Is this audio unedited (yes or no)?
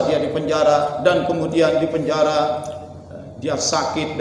yes